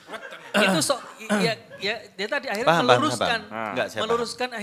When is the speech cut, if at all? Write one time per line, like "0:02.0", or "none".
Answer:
none